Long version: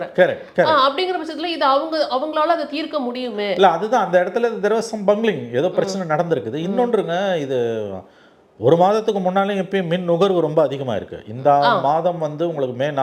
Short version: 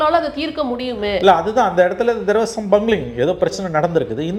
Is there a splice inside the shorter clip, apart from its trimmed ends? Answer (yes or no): no